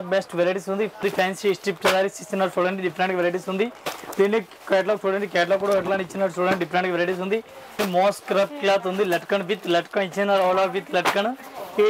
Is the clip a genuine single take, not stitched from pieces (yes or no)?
no